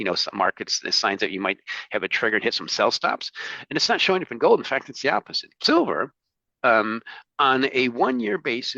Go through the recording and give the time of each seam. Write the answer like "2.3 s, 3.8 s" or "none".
5.6 s